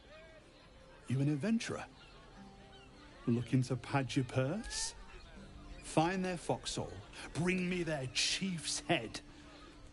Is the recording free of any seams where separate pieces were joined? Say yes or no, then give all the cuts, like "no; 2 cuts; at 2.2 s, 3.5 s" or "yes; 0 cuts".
yes; 0 cuts